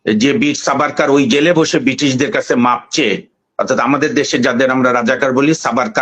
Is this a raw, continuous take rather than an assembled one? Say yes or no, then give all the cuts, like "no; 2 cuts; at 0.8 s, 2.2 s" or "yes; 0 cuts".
yes; 0 cuts